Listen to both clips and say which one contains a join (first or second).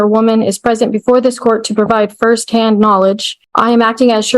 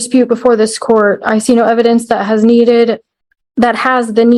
first